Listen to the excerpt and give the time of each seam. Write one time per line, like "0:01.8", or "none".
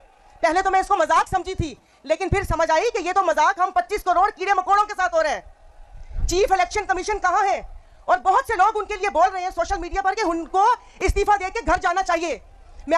none